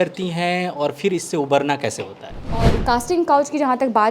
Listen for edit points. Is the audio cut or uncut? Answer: cut